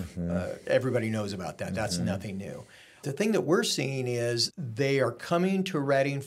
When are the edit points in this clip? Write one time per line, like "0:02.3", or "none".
0:03.0
0:04.6